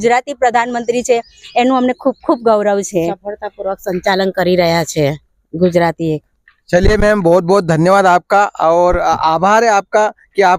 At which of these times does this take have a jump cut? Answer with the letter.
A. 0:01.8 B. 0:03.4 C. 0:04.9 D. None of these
D